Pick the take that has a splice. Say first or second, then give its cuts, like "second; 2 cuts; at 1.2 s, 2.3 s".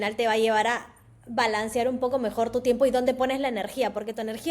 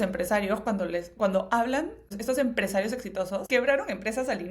second; 2 cuts; at 2.1 s, 3.4 s